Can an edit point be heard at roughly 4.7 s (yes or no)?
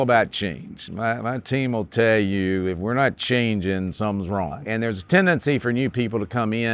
yes